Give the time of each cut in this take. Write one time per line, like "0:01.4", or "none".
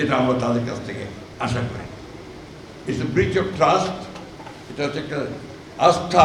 0:02.7